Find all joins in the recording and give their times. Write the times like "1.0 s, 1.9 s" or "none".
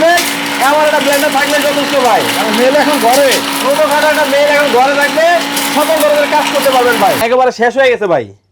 7.2 s

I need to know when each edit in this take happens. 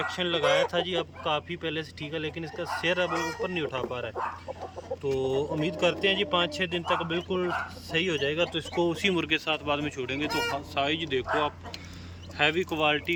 none

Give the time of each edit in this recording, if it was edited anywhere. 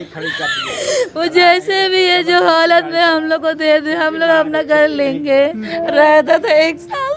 5.7 s

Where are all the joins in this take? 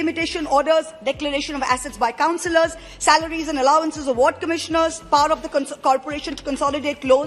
none

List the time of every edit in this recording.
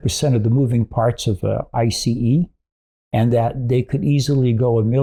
none

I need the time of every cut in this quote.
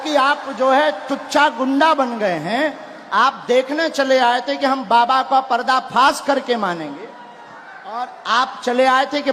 none

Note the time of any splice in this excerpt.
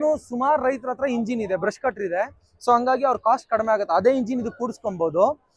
none

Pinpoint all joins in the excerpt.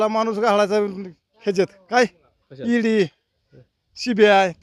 none

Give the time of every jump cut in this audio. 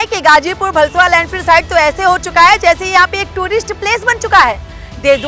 none

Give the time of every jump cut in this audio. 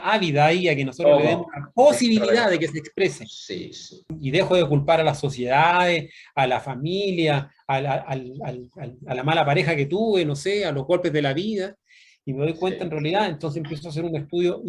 4.2 s

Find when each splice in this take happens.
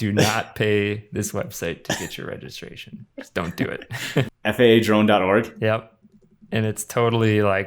4.3 s

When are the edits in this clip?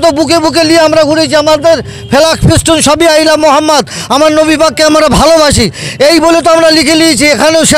none

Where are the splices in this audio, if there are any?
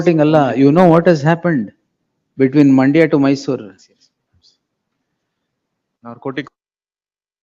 none

